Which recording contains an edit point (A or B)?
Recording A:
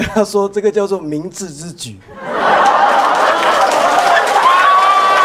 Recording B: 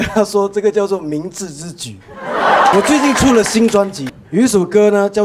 B